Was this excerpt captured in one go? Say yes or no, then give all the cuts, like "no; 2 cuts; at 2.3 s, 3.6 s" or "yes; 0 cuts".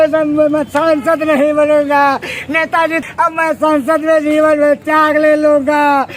no; 1 cut; at 3.0 s